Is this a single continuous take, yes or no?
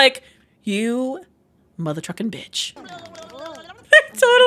no